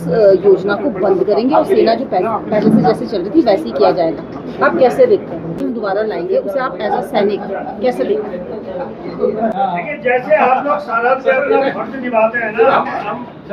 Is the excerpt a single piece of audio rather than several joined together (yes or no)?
no